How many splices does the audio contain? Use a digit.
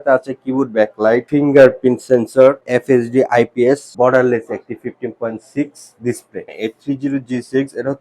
4